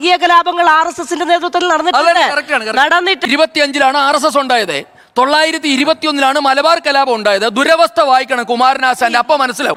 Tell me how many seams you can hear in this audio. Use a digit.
0